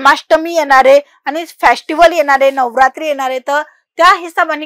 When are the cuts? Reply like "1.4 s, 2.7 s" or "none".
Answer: none